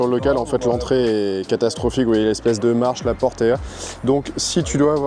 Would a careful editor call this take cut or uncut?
uncut